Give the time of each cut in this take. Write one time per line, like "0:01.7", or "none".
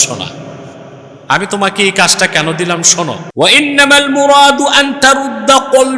0:03.2